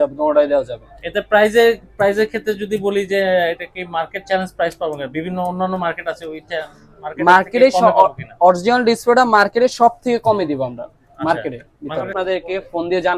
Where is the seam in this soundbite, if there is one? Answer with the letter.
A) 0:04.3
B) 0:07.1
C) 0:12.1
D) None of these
C